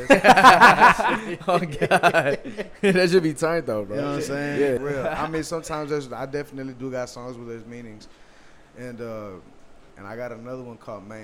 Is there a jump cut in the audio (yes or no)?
yes